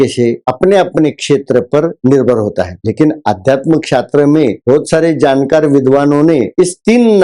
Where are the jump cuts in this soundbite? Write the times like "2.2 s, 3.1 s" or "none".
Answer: none